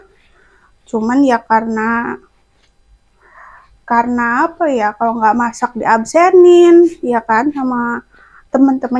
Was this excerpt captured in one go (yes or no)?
yes